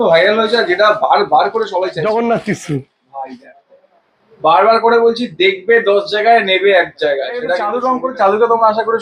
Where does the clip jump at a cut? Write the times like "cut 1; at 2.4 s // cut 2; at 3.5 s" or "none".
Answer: cut 1; at 1.9 s // cut 2; at 7.6 s